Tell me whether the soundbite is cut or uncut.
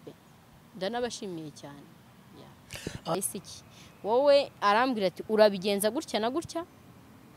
cut